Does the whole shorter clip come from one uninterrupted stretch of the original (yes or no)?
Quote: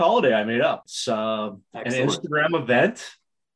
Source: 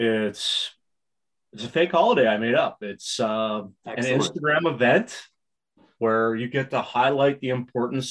no